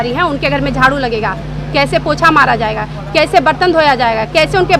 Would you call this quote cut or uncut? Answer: uncut